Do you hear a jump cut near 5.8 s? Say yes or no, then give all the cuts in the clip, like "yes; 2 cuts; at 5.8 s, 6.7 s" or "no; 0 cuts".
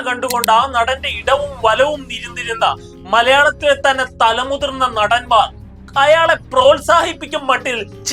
no; 0 cuts